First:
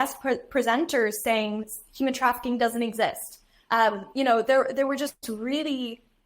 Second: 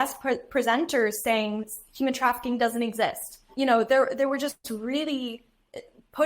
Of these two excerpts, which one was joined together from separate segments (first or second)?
second